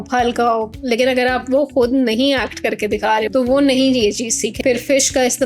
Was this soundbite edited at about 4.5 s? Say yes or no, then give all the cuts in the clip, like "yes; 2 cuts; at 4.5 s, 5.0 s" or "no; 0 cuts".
yes; 2 cuts; at 3.3 s, 4.5 s